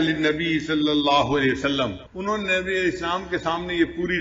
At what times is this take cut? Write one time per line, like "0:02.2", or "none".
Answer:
0:02.1

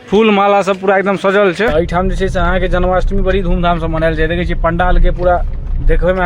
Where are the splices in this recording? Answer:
0:01.7

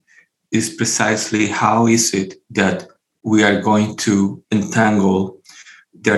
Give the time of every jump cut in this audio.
0:02.4
0:04.4

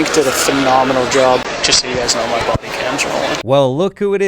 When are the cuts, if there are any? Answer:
0:01.4
0:03.4

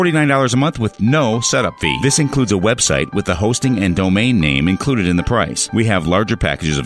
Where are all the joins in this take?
none

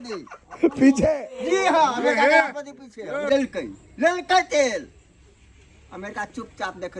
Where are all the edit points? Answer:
0:03.3

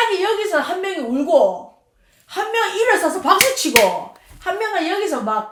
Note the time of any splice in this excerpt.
none

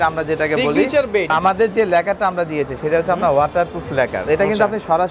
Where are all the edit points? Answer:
0:01.3
0:04.2

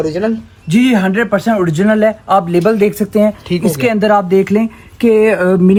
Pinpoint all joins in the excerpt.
none

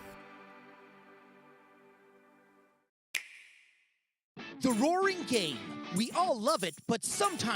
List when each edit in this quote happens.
0:02.9

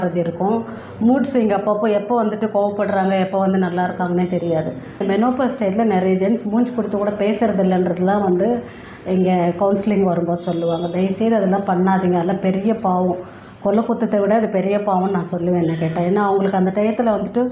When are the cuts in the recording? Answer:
0:05.0

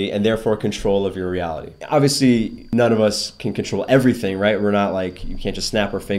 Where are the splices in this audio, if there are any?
0:01.7
0:02.6

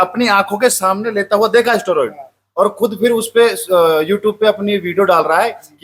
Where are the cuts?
none

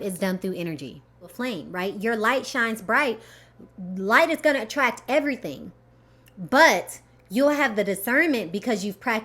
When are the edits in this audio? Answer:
0:01.3

